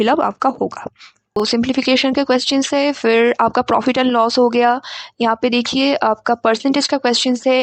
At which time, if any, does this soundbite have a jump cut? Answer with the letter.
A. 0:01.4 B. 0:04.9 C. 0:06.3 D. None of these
A